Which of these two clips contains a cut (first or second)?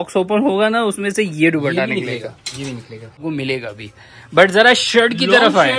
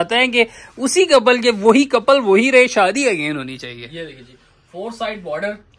first